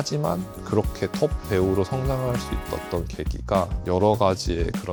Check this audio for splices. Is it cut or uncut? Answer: uncut